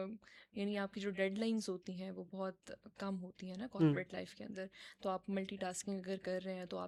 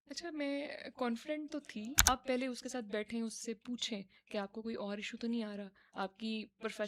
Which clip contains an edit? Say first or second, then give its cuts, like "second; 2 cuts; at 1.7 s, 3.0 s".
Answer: second; 1 cut; at 2.1 s